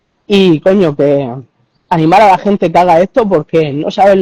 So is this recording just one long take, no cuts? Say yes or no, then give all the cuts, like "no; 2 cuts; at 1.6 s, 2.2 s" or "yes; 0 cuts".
yes; 0 cuts